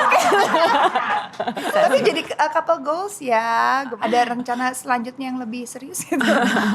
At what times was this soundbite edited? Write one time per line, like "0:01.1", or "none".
0:01.7
0:03.9